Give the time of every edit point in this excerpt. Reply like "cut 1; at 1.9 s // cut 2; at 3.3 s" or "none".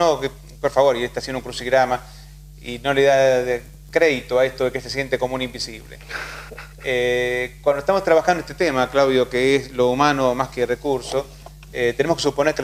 cut 1; at 1.0 s